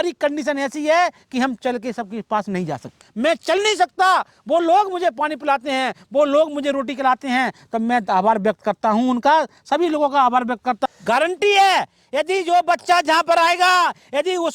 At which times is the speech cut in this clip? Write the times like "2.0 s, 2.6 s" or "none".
3.0 s, 10.8 s